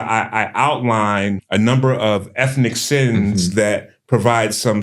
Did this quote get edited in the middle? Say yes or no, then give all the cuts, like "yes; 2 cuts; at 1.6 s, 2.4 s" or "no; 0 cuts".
yes; 1 cut; at 1.4 s